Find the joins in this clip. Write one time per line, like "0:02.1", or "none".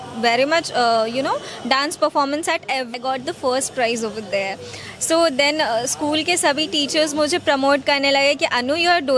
0:02.9